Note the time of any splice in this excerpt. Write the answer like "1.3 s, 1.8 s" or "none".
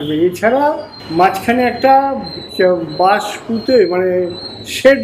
0.9 s

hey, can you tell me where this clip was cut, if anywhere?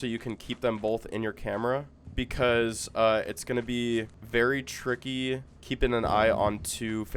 2.0 s, 4.2 s, 5.5 s

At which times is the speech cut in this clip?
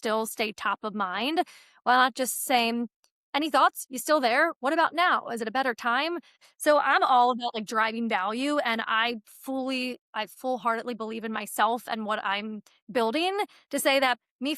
6.3 s

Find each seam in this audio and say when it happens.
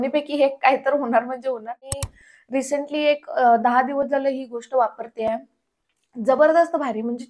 1.9 s

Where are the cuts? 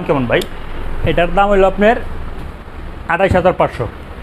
none

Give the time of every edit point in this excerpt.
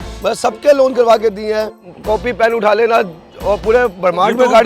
1.8 s

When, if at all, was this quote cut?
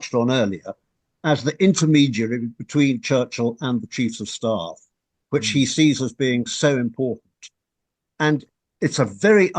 none

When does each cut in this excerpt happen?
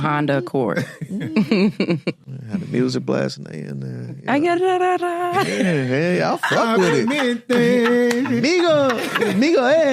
2.3 s

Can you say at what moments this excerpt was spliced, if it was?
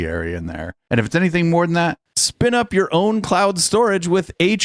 2.0 s

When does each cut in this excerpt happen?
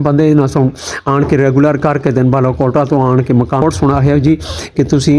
3.6 s

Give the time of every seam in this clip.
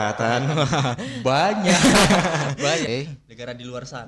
2.9 s

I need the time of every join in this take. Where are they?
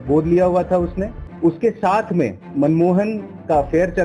1.2 s, 2.4 s

